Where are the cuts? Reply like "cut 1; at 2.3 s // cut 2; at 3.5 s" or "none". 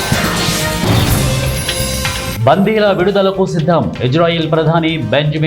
cut 1; at 1.6 s // cut 2; at 2.4 s

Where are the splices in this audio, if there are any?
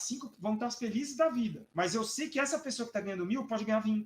cut 1; at 1.6 s

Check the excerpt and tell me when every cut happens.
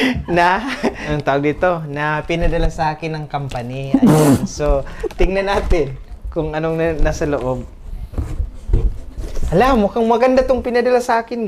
cut 1; at 1.0 s

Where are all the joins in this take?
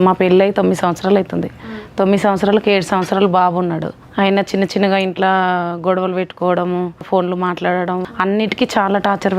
cut 1; at 4.0 s // cut 2; at 7.1 s // cut 3; at 8.1 s

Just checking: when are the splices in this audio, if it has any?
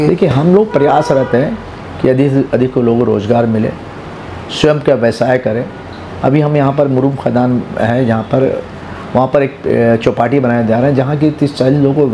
none

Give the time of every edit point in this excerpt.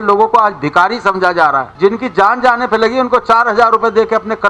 cut 1; at 1.7 s

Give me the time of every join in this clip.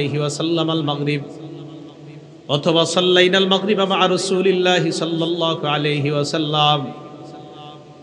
none

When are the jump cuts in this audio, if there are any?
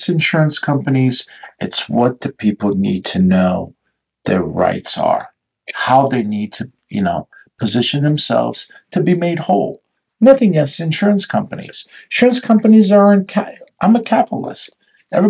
none

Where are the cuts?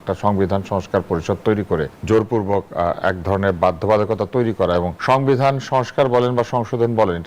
cut 1; at 1.9 s // cut 2; at 4.9 s

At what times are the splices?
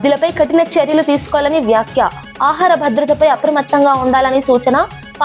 none

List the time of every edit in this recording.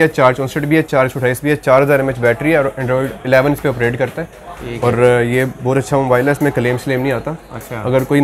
none

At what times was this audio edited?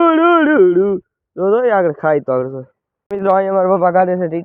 cut 1; at 3.0 s

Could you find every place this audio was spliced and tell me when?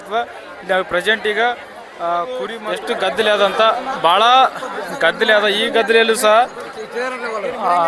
cut 1; at 2.7 s

